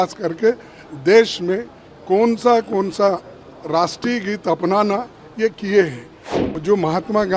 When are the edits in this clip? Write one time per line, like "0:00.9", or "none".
0:06.5